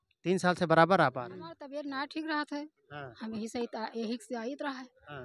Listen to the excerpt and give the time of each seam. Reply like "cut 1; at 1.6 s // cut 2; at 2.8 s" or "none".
cut 1; at 1.6 s